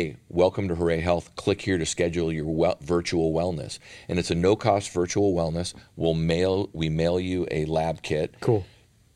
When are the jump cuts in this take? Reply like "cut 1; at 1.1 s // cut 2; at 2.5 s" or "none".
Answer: none